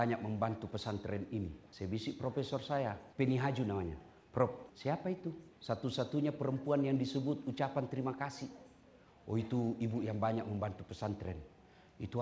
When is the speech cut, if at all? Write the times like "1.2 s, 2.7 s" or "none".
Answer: 1.6 s, 3.0 s, 5.1 s